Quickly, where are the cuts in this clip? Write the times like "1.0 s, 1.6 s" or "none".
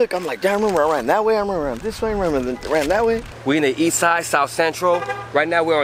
3.4 s